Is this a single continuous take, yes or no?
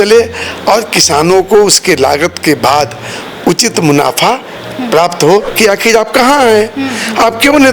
no